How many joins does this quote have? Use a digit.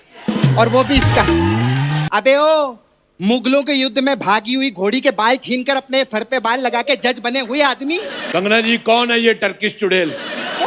2